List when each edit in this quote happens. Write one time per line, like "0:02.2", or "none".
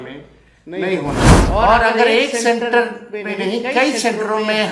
0:01.4